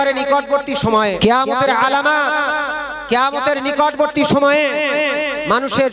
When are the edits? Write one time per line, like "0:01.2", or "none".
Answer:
0:01.1